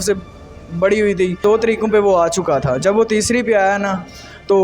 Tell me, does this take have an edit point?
yes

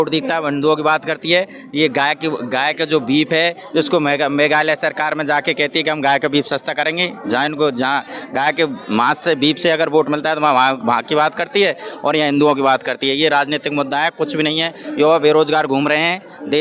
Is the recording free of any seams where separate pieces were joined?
yes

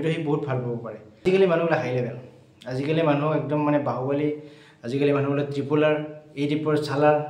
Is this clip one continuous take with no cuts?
no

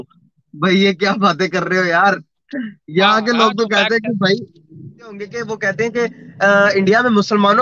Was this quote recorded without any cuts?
no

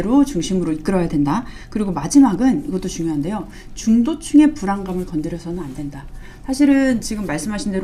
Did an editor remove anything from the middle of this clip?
no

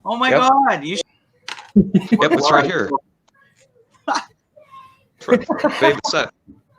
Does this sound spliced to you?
yes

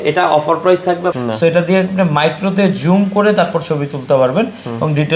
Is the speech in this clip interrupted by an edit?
yes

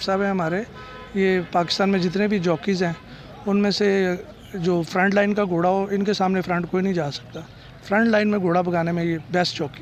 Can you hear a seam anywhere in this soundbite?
no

